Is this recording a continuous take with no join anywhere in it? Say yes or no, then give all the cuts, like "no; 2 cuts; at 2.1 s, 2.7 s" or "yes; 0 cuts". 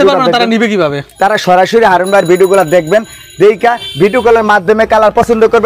no; 1 cut; at 1.0 s